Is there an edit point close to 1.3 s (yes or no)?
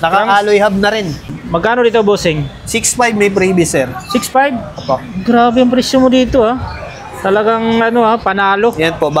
yes